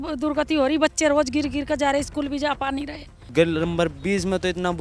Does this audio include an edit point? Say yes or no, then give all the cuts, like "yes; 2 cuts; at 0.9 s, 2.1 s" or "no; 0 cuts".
yes; 1 cut; at 3.2 s